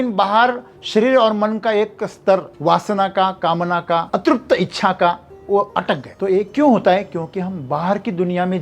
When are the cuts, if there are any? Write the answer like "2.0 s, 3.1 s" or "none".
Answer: 2.5 s, 4.1 s, 6.1 s